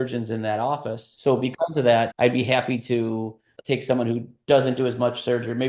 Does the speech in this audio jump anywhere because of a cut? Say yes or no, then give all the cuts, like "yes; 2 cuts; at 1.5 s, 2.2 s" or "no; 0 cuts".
yes; 1 cut; at 1.1 s